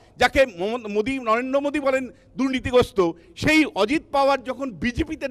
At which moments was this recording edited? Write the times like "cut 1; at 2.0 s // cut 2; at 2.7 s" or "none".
none